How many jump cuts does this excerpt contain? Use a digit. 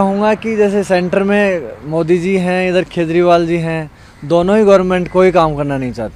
0